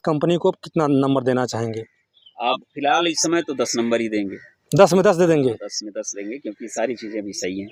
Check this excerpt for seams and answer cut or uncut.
uncut